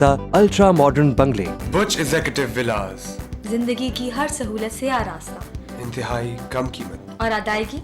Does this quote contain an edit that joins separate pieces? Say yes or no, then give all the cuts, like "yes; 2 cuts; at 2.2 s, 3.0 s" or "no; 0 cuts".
yes; 1 cut; at 1.5 s